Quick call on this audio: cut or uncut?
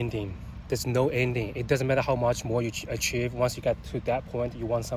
uncut